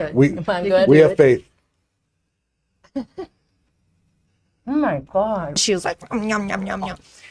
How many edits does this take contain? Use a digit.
1